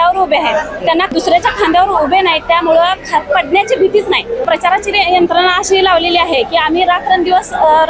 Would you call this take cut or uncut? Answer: cut